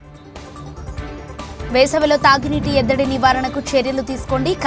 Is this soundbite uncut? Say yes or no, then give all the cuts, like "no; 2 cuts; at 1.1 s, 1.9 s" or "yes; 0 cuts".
yes; 0 cuts